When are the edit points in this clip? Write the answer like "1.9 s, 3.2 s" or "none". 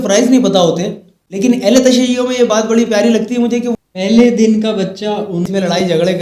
1.4 s, 3.7 s, 5.3 s